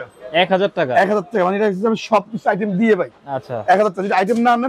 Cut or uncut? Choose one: uncut